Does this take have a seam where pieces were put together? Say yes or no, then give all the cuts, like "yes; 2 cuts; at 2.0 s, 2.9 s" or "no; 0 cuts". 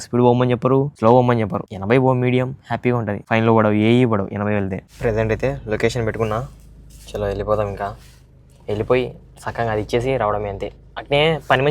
yes; 4 cuts; at 0.9 s, 1.7 s, 3.2 s, 4.9 s